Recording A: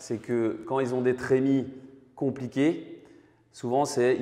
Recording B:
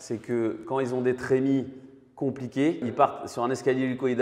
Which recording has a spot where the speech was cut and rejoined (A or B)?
B